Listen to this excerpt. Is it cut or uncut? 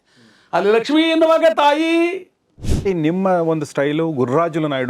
cut